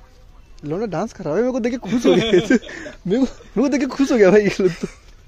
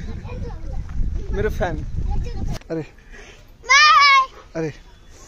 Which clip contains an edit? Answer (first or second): second